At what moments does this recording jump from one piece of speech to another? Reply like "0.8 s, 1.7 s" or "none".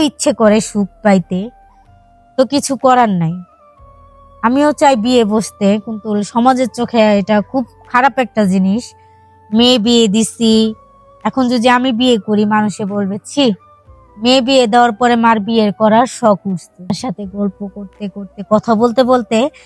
16.9 s